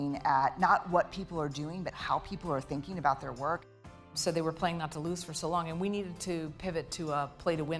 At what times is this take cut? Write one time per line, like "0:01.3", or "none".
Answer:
0:04.1